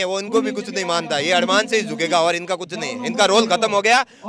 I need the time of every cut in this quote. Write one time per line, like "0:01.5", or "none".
none